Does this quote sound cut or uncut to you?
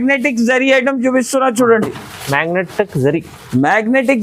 uncut